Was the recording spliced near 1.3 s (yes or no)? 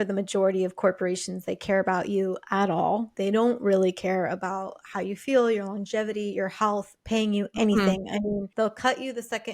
no